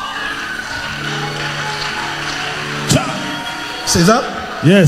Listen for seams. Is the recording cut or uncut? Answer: uncut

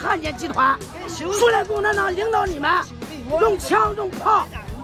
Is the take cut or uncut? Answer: uncut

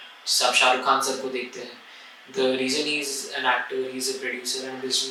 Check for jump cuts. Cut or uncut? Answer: uncut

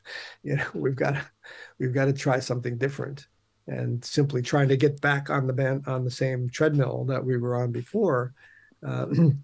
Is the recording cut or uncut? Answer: uncut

